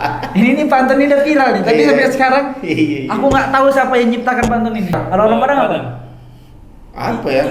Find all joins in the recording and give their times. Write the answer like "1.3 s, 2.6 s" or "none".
4.9 s